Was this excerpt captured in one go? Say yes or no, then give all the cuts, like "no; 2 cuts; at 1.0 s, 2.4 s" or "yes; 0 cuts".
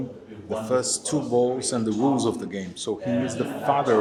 yes; 0 cuts